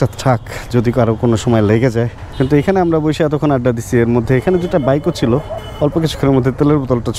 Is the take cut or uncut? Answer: uncut